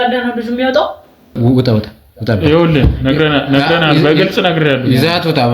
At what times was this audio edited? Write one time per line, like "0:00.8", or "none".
0:01.4